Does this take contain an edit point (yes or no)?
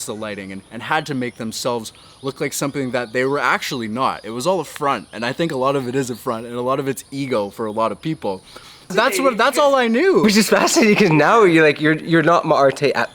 yes